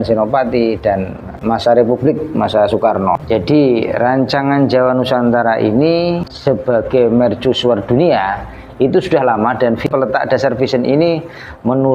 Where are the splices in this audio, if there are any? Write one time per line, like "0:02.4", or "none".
0:01.3
0:03.2
0:06.3
0:09.9